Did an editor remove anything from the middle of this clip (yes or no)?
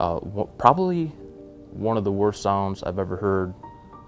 no